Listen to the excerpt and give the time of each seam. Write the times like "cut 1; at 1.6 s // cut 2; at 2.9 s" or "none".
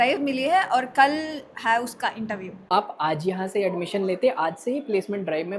cut 1; at 2.7 s